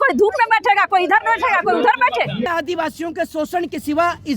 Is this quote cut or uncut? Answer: cut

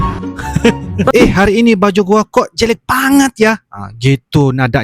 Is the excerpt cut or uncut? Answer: cut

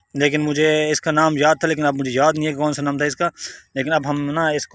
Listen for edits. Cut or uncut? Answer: uncut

